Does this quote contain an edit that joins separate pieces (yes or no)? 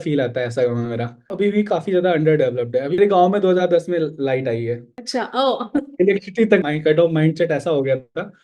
yes